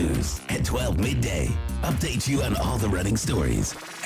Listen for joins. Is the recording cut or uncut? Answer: uncut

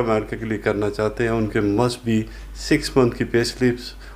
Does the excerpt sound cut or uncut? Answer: uncut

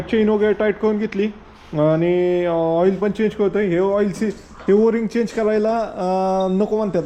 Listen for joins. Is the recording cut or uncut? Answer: uncut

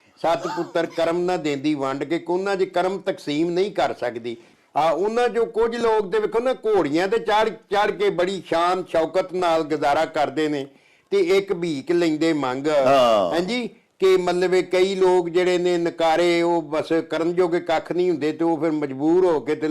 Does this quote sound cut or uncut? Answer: uncut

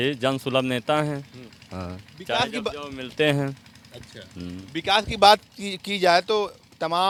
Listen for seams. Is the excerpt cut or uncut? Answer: uncut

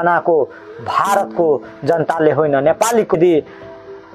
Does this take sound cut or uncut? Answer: cut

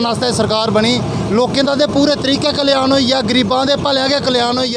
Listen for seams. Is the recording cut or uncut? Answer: uncut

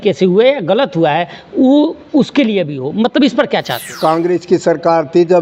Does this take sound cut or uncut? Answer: cut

